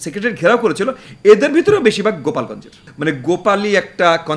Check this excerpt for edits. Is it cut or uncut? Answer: cut